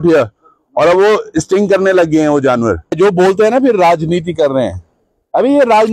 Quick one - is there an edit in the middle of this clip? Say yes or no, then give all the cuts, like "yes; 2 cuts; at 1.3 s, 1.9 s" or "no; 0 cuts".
yes; 1 cut; at 3.0 s